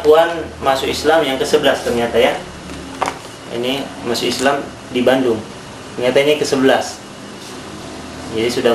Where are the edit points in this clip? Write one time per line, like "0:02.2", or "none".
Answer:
none